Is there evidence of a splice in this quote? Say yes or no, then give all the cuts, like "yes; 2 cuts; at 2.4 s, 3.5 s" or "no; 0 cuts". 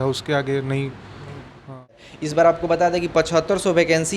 yes; 1 cut; at 2.1 s